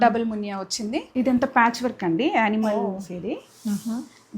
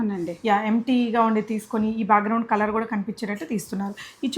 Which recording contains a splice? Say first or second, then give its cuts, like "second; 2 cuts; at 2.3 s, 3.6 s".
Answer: first; 1 cut; at 1.1 s